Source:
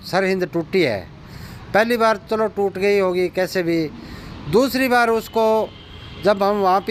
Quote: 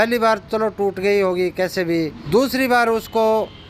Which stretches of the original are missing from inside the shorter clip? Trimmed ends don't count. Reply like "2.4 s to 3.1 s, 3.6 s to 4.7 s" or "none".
4.0 s to 4.4 s